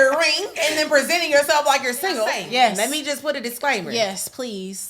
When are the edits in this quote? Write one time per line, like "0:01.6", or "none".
0:02.4